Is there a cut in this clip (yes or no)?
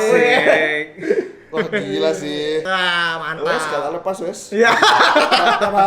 yes